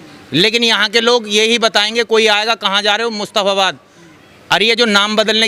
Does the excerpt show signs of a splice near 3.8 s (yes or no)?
no